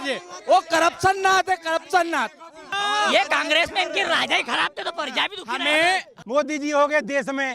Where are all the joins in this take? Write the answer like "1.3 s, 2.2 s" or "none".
2.7 s, 6.1 s